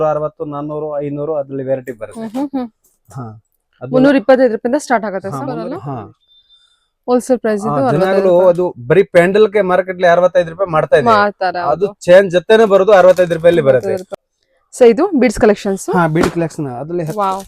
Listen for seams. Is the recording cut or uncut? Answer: cut